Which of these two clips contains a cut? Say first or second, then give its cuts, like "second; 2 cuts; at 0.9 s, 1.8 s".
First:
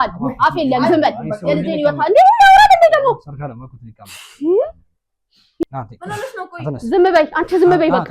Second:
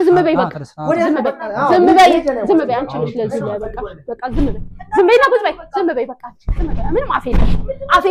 first; 1 cut; at 5.6 s